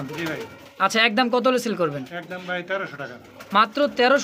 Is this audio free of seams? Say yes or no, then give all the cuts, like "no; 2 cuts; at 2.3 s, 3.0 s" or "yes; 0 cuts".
yes; 0 cuts